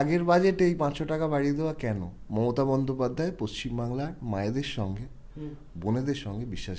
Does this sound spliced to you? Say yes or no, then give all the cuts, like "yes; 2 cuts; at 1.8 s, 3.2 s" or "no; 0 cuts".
yes; 1 cut; at 2.1 s